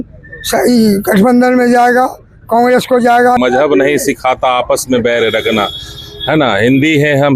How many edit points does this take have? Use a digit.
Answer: 1